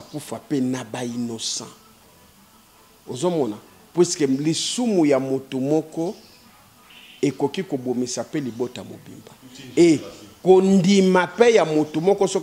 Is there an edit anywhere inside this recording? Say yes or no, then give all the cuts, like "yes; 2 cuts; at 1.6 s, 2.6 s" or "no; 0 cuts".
no; 0 cuts